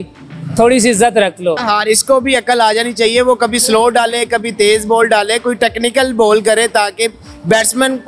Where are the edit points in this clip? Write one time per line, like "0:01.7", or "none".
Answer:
0:01.6